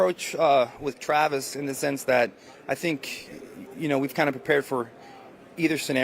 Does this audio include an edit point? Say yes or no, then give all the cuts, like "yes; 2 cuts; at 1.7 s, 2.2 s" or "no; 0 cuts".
no; 0 cuts